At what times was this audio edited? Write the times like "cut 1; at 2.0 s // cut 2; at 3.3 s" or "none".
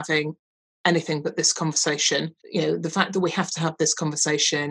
cut 1; at 2.4 s